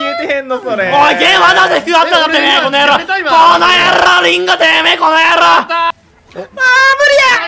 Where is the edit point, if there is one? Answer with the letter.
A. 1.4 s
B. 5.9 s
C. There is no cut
B